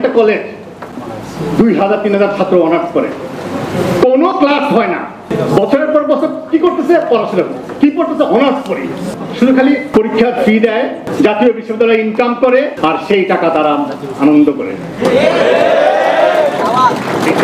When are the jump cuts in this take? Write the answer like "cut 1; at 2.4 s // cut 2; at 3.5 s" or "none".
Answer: cut 1; at 5.3 s // cut 2; at 9.1 s // cut 3; at 9.9 s // cut 4; at 11.0 s // cut 5; at 12.7 s